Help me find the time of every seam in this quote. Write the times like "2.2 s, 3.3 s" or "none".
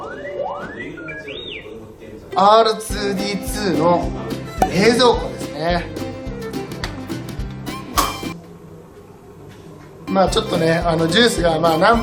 9.4 s